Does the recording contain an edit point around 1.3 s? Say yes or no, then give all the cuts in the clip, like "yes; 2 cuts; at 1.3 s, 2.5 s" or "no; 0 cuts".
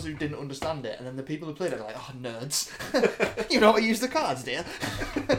no; 0 cuts